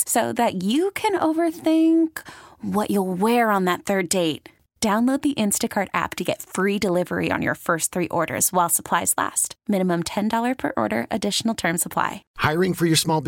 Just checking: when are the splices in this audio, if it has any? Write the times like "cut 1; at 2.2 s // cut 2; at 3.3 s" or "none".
cut 1; at 12.2 s

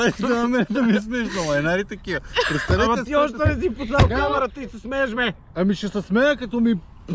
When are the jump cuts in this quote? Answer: none

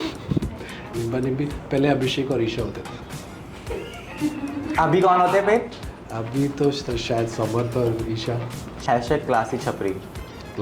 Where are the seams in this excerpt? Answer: cut 1; at 8.7 s

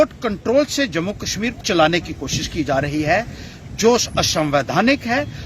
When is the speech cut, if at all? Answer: cut 1; at 1.6 s

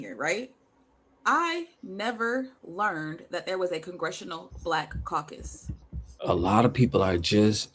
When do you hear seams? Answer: cut 1; at 6.1 s

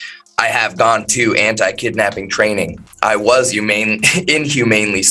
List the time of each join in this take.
cut 1; at 2.8 s

